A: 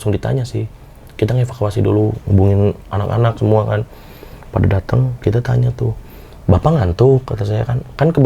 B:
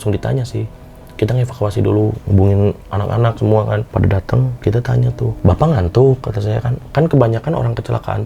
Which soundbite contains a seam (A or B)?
B